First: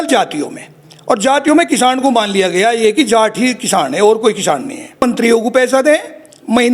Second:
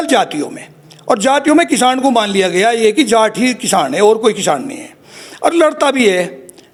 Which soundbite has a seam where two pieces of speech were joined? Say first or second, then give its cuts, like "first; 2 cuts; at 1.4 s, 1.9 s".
first; 1 cut; at 5.0 s